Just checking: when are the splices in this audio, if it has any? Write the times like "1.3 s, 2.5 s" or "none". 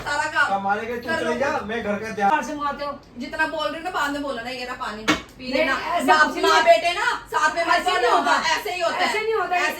2.3 s